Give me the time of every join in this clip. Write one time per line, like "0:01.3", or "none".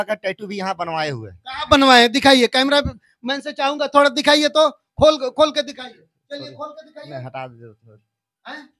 none

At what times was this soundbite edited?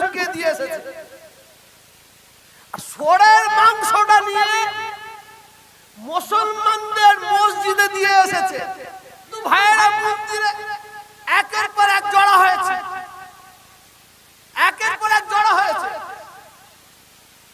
0:09.3

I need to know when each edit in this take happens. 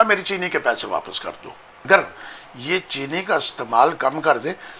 0:01.9

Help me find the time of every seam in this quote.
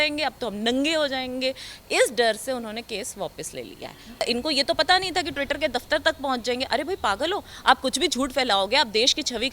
0:04.2

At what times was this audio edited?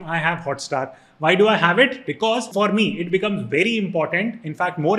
0:02.5

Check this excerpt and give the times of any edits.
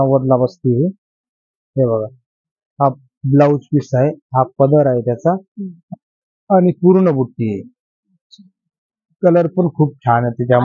none

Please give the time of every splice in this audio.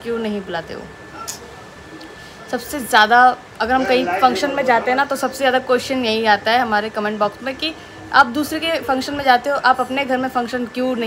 none

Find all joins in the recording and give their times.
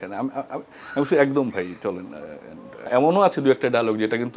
0:02.9

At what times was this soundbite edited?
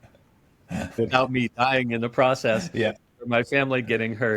0:01.0
0:03.0

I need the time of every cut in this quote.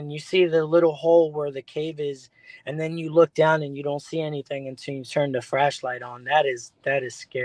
none

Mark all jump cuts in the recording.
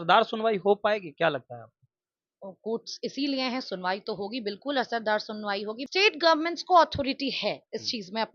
0:05.8

